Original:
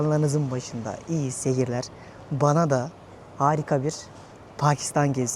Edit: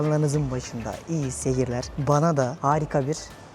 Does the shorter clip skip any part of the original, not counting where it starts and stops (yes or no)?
yes